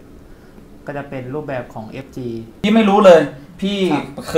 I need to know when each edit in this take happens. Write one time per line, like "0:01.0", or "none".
0:02.4